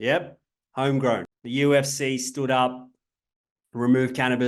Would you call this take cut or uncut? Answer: cut